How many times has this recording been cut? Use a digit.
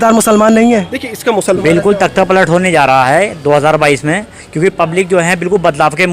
1